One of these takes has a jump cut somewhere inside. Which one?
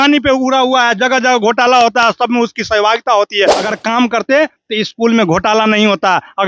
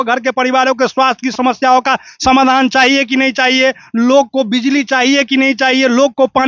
first; 1 cut; at 3.6 s

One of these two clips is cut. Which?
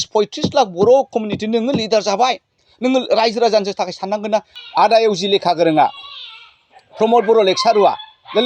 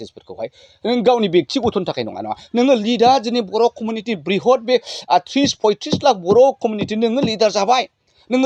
first; 1 cut; at 4.6 s

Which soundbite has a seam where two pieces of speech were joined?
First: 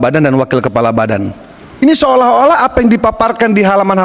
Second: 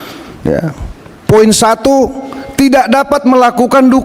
first; 1 cut; at 1.8 s

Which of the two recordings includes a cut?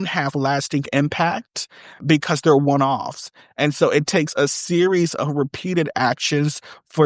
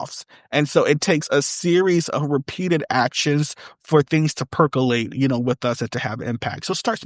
first; 1 cut; at 2.0 s

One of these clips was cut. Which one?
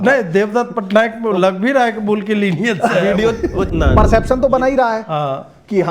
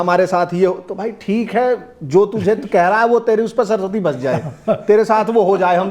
first; 1 cut; at 3.7 s

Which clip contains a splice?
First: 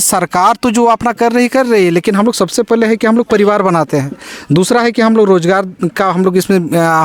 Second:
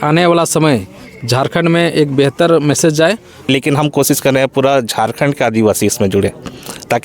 second; 1 cut; at 3.5 s

